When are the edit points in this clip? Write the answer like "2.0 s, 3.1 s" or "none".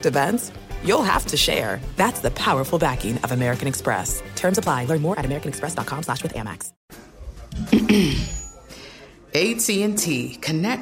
6.7 s